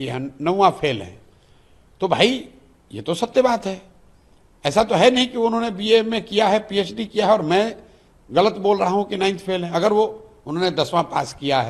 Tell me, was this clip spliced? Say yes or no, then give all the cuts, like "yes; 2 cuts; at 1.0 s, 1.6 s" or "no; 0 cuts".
no; 0 cuts